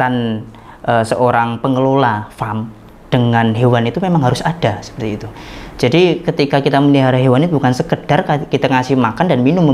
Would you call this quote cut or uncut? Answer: uncut